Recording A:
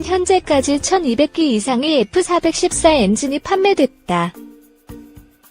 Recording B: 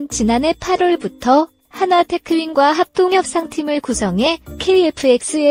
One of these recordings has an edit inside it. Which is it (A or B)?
A